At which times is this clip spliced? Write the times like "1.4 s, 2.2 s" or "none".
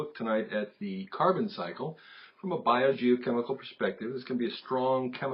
none